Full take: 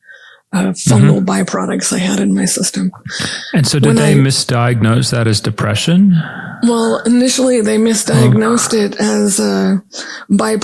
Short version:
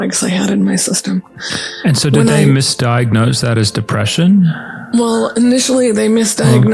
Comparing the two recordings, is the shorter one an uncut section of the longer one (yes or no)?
yes